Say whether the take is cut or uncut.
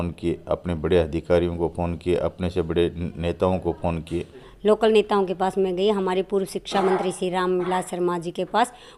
cut